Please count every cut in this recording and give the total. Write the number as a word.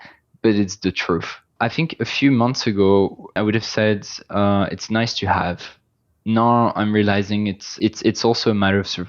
three